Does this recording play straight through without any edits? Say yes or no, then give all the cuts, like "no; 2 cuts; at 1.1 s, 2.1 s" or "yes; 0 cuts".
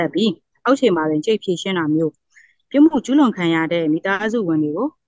yes; 0 cuts